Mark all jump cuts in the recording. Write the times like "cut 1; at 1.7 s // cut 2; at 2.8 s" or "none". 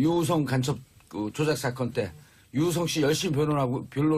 cut 1; at 3.2 s

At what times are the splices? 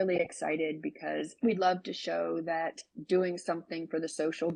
none

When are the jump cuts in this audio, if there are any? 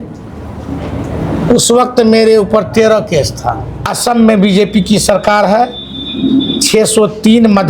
cut 1; at 3.9 s

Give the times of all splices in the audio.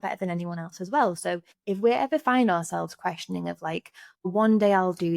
cut 1; at 1.5 s // cut 2; at 4.3 s

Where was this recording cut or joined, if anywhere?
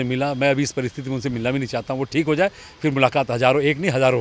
none

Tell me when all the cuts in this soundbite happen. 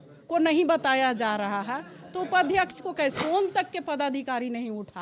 cut 1; at 3.1 s

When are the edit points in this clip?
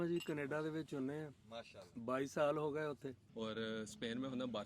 cut 1; at 3.2 s

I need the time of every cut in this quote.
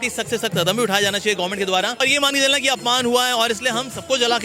cut 1; at 2.0 s

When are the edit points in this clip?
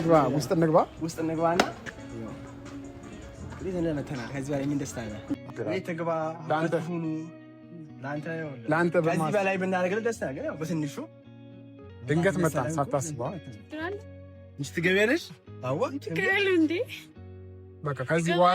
cut 1; at 5.5 s

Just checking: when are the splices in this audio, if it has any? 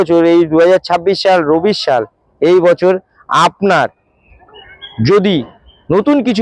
none

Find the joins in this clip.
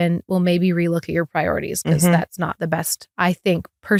none

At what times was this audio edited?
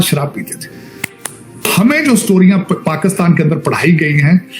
cut 1; at 1.6 s

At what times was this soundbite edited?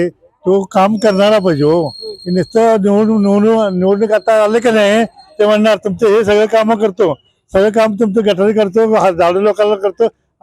none

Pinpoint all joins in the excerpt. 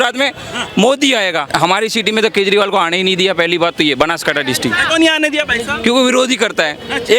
cut 1; at 1.5 s // cut 2; at 4.8 s

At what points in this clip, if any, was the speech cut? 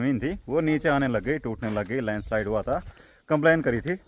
cut 1; at 3.0 s

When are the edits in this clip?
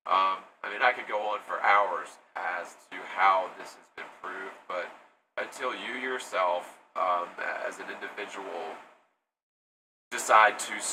none

